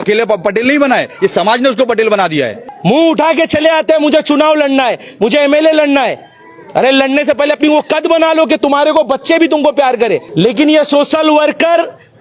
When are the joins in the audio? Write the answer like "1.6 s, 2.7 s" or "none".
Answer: 2.6 s, 10.3 s